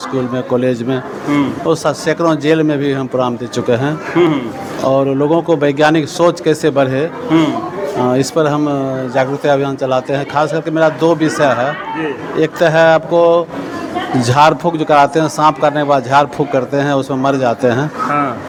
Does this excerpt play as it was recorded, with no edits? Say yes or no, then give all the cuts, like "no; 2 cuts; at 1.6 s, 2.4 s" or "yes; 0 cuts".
yes; 0 cuts